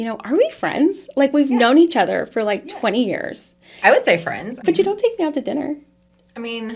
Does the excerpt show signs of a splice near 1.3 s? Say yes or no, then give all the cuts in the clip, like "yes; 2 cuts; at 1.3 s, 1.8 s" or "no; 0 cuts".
no; 1 cut; at 4.6 s